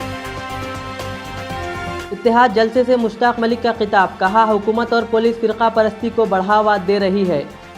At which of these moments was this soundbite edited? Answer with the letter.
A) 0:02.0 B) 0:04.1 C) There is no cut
A